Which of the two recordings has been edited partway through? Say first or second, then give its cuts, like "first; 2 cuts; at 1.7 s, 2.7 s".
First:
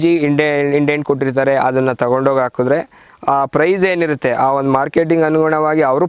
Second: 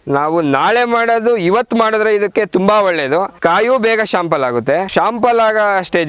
second; 2 cuts; at 3.3 s, 4.9 s